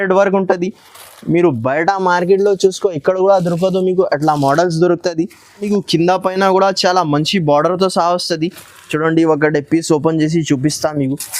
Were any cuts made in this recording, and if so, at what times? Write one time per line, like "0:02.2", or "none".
0:05.6